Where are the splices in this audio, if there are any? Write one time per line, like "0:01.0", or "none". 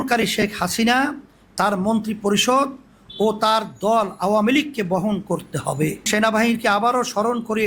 0:06.1